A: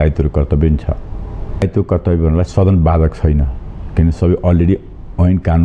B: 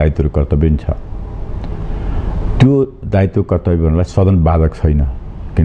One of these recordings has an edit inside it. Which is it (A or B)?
A